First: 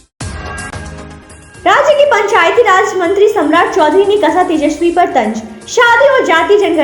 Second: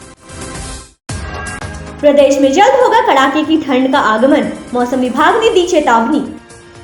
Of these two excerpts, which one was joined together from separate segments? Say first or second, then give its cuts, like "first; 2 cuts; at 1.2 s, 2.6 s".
first; 1 cut; at 1.0 s